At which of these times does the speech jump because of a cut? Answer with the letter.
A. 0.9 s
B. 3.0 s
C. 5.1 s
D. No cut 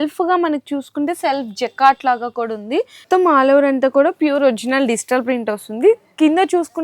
B